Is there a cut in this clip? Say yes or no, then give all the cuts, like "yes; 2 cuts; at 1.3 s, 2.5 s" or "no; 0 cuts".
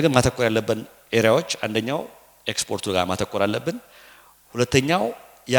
no; 0 cuts